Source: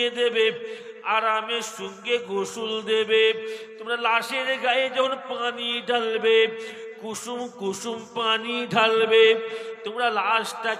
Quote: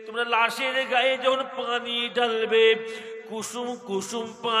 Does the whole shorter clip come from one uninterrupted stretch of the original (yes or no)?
yes